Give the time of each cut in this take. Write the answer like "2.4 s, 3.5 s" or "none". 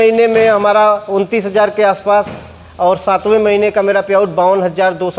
none